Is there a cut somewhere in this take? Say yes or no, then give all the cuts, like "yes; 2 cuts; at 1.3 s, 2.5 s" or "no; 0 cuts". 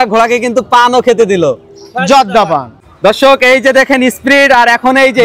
yes; 1 cut; at 2.9 s